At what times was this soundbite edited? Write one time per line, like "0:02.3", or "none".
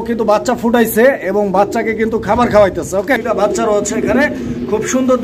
0:03.2

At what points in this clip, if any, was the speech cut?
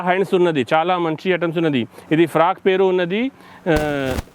none

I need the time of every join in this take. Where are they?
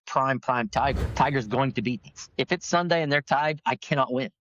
0:01.0
0:02.2

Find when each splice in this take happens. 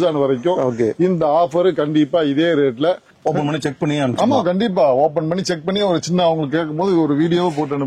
0:03.1

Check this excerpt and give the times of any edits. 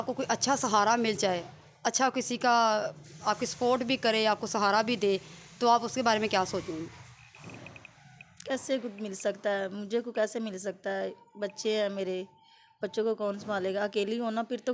none

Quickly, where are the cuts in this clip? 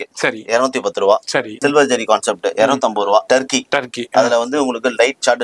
0:01.5
0:03.3

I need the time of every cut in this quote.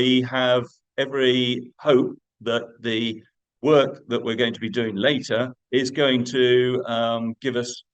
0:05.6

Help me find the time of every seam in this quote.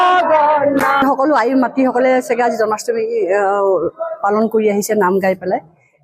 0:01.0

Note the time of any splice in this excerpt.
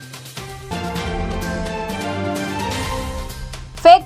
0:03.1

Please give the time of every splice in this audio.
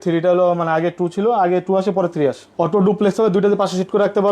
0:02.4

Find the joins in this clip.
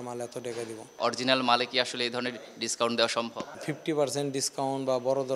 0:01.0
0:03.5

